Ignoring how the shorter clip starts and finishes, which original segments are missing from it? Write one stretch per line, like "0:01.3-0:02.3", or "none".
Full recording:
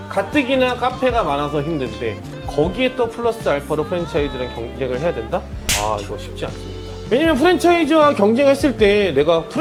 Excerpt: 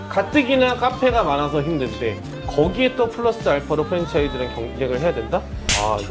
none